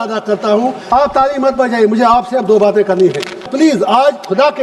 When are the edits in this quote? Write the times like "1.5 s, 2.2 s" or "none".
0.8 s, 3.4 s